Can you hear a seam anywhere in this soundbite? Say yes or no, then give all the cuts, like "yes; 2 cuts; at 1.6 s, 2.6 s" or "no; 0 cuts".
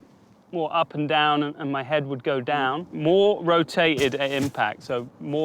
yes; 1 cut; at 2.9 s